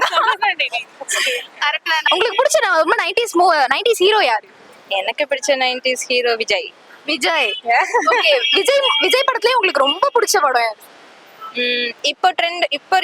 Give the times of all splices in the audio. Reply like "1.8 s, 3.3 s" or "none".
1.9 s